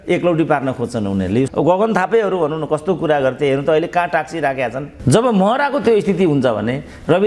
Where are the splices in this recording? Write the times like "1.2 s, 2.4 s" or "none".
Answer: 1.5 s, 4.9 s